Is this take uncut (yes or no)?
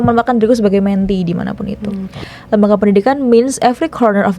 no